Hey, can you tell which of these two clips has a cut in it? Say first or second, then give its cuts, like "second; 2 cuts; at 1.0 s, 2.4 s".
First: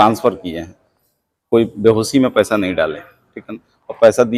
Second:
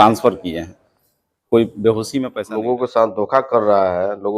second; 1 cut; at 2.4 s